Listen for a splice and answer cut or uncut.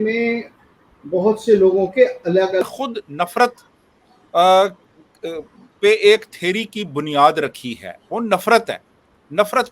cut